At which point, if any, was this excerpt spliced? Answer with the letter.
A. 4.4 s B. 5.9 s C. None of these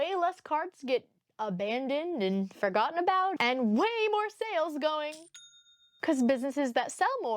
B